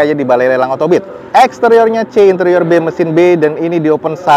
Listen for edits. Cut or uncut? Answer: uncut